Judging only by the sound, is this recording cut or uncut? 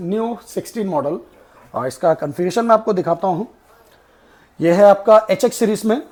uncut